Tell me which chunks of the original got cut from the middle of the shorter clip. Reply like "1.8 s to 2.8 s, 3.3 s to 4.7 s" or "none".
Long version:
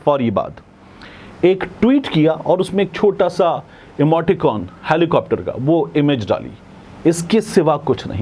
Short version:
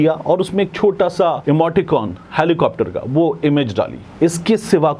3.6 s to 3.9 s, 6.5 s to 6.9 s